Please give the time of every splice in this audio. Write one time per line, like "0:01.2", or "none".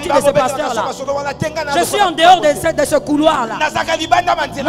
none